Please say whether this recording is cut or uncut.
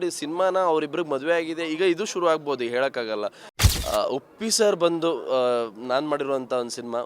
cut